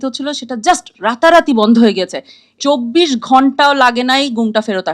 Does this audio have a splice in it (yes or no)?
yes